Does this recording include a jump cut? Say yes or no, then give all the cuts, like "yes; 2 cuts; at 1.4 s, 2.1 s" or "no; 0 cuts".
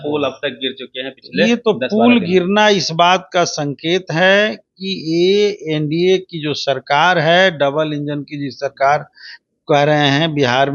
no; 0 cuts